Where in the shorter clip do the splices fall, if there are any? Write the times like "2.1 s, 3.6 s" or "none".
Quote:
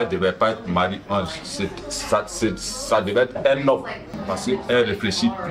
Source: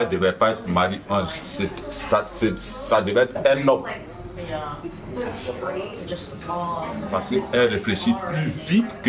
4.1 s